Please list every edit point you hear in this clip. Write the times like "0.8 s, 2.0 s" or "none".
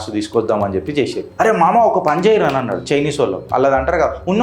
1.2 s